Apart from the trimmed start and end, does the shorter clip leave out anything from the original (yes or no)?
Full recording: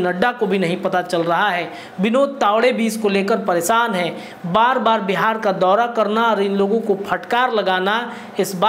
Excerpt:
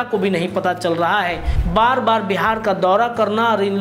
yes